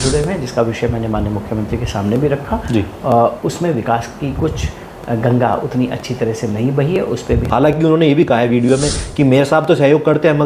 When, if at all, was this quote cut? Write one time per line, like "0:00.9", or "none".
0:07.5